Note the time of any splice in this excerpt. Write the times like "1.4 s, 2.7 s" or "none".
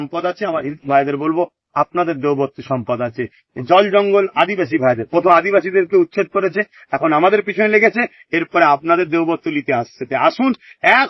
none